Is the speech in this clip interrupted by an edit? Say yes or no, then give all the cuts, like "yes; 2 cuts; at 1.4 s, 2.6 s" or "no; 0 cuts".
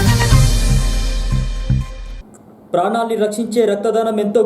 yes; 1 cut; at 2.0 s